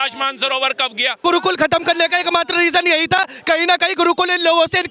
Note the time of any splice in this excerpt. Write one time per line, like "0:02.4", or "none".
0:01.2

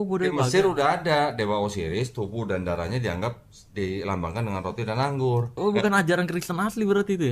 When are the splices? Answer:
0:05.5

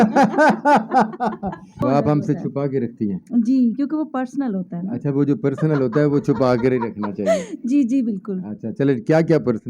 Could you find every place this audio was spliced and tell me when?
0:01.7

